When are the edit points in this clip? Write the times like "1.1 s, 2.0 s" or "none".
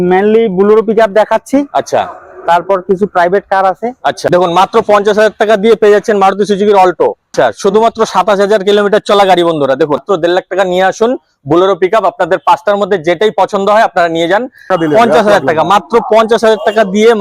4.3 s, 7.3 s, 10.0 s, 14.7 s